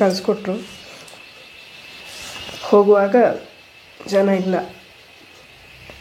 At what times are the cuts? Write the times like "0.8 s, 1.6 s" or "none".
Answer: none

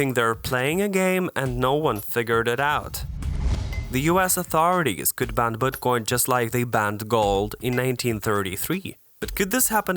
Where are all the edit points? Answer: 3.3 s

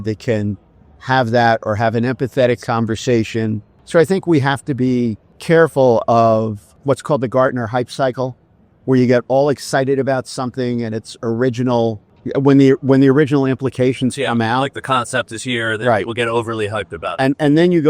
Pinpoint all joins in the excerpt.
3.7 s, 5.3 s, 6.7 s, 12.1 s

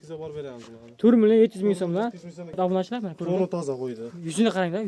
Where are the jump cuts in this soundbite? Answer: 2.6 s

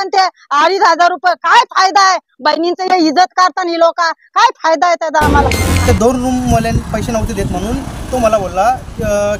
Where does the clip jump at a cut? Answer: 5.6 s

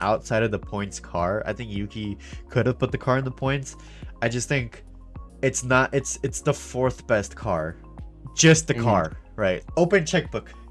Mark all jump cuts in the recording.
9.6 s

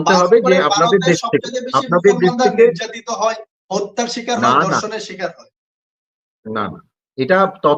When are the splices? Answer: none

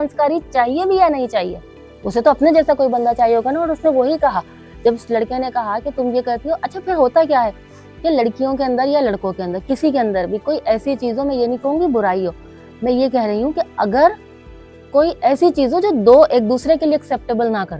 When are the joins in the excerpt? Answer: none

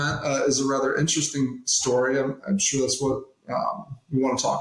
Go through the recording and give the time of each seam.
none

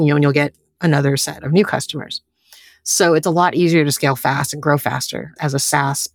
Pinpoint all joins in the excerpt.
none

